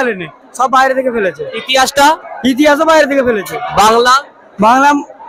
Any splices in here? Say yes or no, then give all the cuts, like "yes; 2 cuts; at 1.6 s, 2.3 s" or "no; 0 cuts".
no; 0 cuts